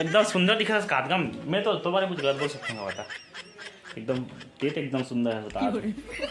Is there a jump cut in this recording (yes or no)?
no